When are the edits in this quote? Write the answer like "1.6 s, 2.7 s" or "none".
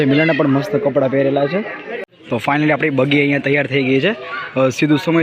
2.1 s